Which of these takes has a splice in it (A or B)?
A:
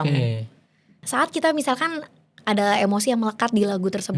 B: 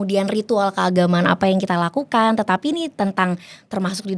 A